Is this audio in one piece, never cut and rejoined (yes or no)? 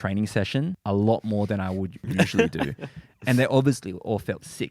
no